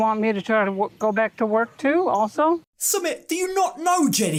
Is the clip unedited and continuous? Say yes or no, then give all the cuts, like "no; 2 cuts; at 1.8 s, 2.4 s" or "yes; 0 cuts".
yes; 0 cuts